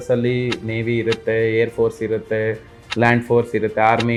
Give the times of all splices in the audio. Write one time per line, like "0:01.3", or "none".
none